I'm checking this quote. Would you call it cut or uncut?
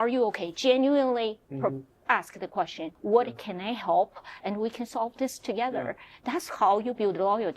cut